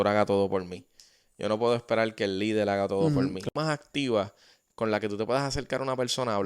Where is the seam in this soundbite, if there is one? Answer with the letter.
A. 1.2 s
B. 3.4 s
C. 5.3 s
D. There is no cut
B